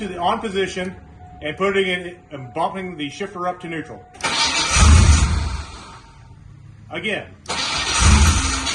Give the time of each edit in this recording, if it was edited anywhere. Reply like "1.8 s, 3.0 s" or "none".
none